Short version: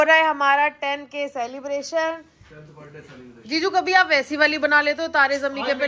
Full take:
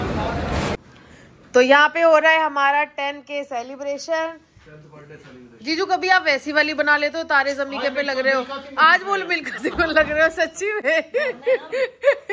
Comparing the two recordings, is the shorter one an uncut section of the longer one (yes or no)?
yes